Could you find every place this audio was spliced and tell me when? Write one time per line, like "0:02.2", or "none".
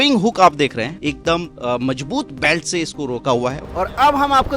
0:00.9
0:03.7